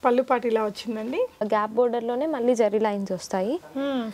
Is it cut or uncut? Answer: cut